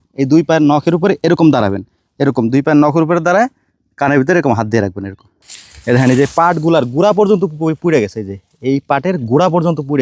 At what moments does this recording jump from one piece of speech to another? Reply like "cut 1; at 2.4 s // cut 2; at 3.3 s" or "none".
cut 1; at 5.4 s